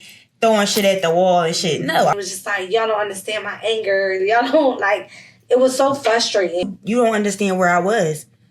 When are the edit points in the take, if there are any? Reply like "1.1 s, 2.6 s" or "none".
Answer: 2.1 s, 6.6 s